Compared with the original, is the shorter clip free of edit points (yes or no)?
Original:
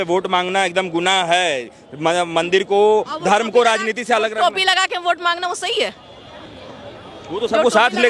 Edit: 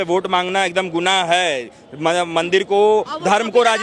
yes